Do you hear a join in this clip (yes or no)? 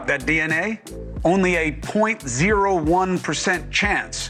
no